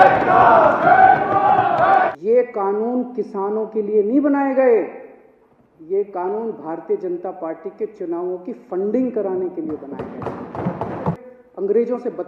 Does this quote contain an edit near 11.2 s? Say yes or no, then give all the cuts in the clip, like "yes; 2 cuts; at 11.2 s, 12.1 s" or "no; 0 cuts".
yes; 2 cuts; at 2.1 s, 11.2 s